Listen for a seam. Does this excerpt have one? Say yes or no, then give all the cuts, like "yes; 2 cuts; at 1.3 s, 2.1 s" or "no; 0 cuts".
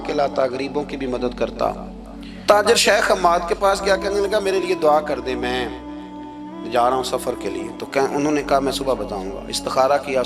yes; 1 cut; at 2.4 s